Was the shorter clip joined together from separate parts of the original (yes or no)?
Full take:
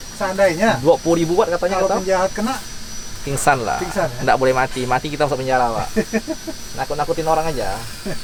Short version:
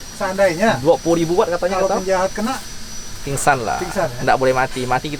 no